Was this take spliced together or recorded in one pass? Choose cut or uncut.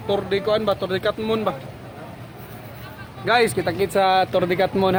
uncut